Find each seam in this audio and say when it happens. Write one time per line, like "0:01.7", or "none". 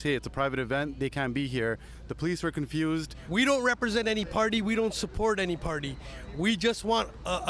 0:03.2

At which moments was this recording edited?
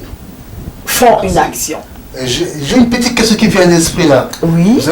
0:01.6

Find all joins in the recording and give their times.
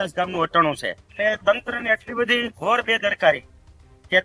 0:01.0

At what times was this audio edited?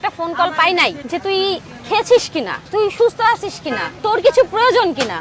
none

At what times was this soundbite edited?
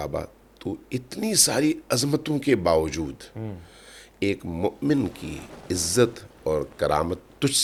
none

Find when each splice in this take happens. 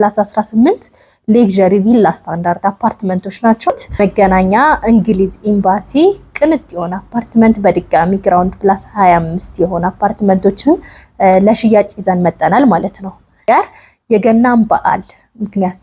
0:03.7
0:13.4

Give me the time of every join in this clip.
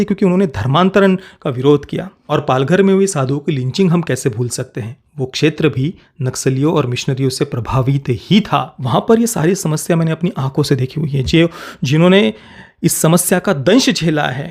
0:02.2
0:08.8

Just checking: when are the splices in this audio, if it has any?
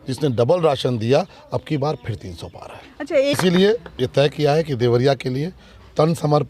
0:03.4

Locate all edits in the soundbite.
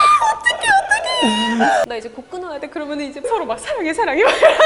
0:01.8

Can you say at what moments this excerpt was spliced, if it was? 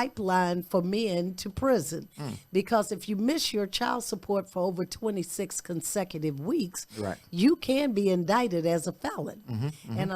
none

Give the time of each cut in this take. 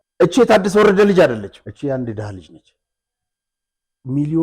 0:01.6

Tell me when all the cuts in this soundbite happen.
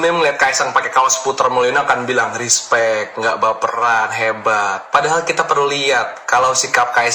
none

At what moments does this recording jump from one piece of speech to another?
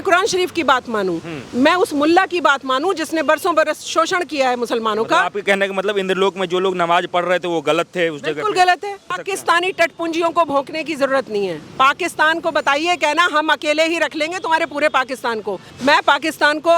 0:09.2
0:15.6

